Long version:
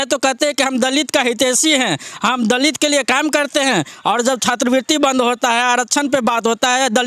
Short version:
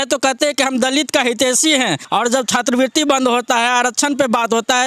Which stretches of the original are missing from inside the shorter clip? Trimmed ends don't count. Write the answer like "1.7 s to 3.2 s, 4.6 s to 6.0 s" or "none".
2.0 s to 4.0 s